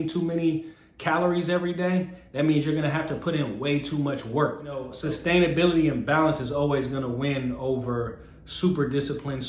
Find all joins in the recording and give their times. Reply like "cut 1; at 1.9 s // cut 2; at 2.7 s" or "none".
cut 1; at 4.9 s